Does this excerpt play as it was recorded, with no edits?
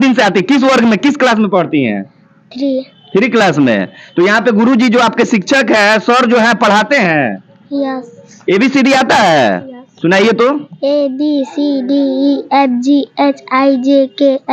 no; 1 cut; at 8.3 s

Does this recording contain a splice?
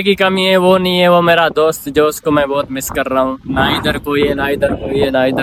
no; 0 cuts

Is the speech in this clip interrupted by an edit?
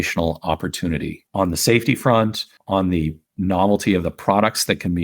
yes; 3 cuts; at 1.2 s, 2.5 s, 3.2 s

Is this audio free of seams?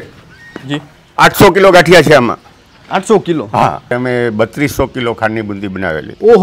no; 1 cut; at 3.9 s

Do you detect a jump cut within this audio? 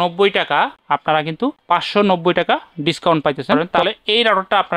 yes; 1 cut; at 3.7 s

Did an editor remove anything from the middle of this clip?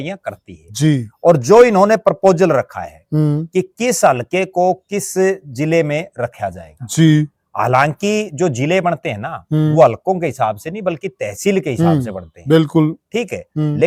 no; 0 cuts

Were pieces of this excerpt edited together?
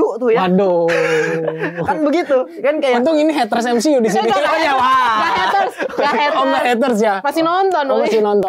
no; 0 cuts

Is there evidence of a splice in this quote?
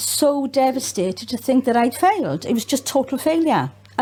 no; 0 cuts

